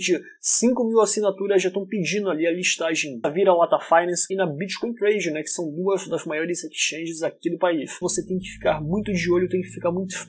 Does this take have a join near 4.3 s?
yes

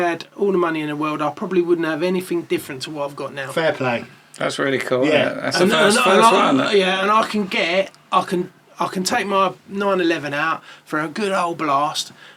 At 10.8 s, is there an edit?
no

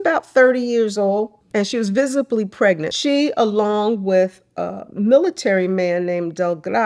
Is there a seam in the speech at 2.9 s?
yes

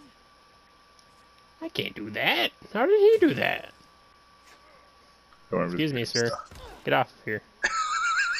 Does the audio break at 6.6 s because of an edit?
no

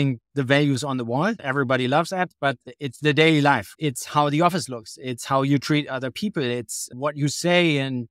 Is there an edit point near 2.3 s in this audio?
no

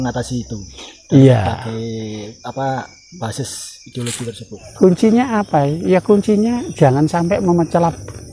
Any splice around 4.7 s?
yes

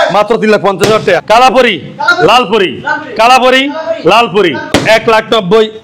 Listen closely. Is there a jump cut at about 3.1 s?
no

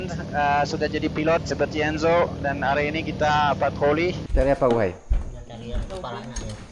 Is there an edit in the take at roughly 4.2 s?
yes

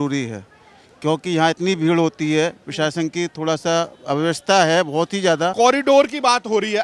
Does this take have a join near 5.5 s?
yes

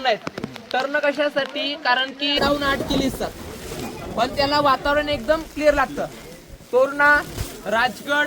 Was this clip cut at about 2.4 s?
yes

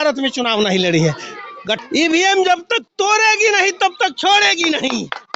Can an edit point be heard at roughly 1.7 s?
yes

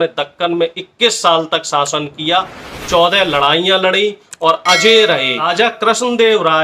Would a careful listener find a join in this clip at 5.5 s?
yes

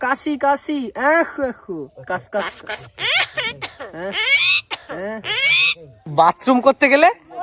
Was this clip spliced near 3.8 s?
no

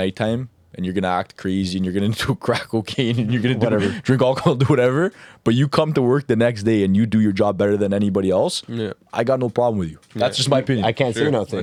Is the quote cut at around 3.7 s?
no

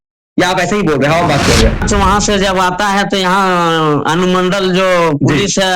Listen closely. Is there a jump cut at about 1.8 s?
yes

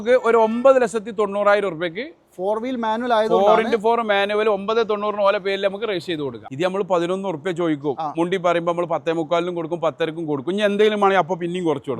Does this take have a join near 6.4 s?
yes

